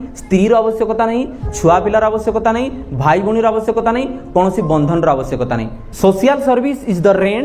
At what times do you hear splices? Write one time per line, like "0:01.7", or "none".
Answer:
0:05.8